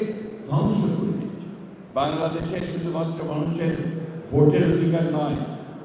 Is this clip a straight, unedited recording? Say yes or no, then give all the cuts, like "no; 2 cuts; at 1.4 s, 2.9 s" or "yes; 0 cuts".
no; 1 cut; at 1.8 s